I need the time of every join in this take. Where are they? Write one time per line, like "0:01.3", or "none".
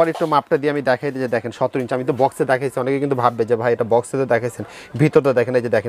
none

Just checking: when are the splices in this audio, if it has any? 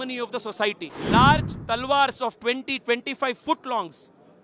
0:00.9

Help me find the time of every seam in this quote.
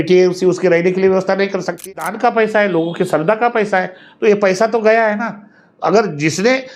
0:01.9

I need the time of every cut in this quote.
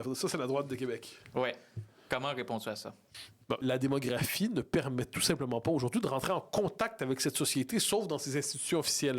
0:03.6

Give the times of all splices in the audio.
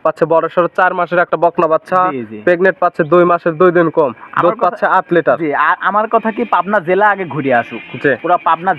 none

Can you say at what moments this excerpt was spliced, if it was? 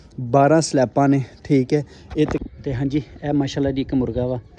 0:02.4

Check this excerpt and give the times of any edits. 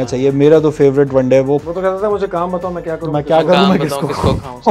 0:01.6

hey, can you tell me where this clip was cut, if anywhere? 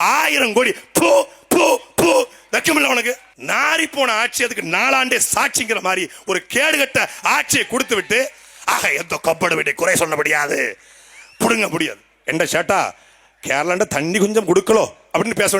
0:03.3
0:12.1

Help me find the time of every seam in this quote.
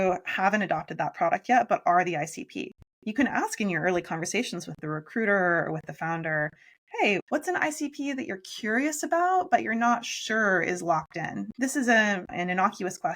0:07.2
0:11.5

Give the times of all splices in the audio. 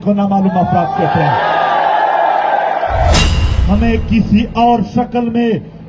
0:03.2

